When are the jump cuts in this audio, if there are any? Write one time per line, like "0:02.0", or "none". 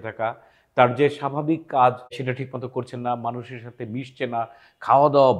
0:02.2